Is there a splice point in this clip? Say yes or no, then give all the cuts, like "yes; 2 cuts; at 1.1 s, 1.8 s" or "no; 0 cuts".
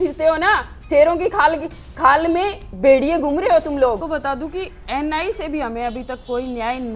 yes; 1 cut; at 4.0 s